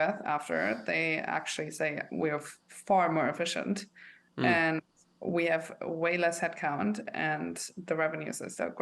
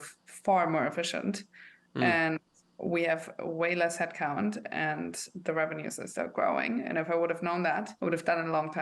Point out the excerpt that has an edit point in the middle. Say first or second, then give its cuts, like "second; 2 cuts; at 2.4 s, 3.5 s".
second; 1 cut; at 7.9 s